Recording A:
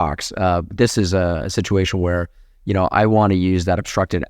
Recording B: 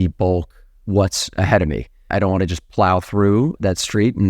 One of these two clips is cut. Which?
B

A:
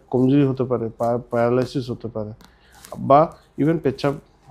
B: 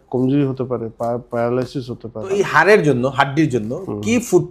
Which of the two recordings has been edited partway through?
B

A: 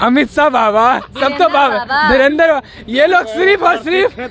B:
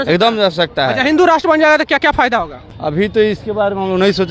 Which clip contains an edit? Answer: B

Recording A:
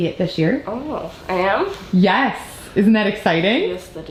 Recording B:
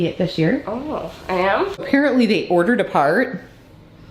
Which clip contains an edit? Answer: B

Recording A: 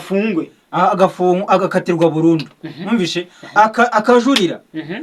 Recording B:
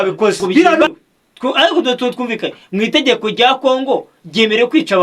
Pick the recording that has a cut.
B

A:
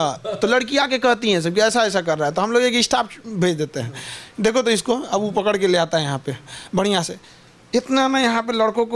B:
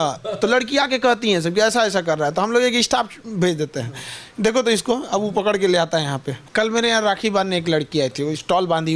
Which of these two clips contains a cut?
B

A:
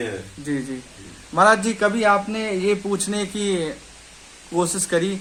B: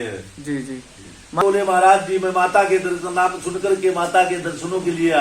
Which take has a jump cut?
B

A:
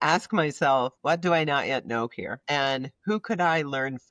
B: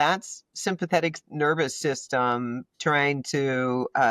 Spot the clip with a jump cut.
A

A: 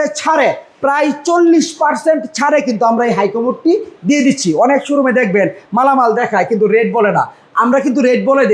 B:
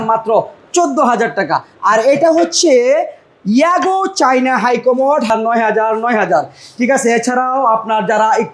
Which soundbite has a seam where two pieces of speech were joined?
B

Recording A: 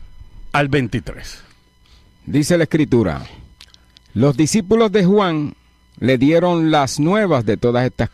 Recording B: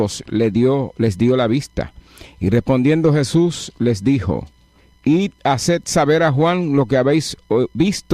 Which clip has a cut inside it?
B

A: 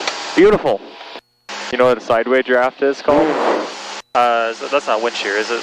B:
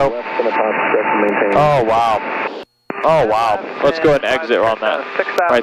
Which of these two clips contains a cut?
A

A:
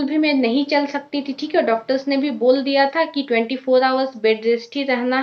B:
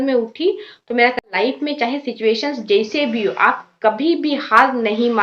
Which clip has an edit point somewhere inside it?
B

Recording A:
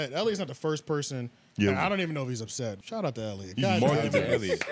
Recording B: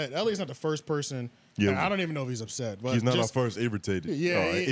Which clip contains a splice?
A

